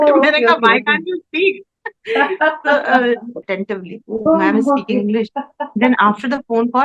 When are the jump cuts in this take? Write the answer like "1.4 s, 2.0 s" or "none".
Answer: 3.5 s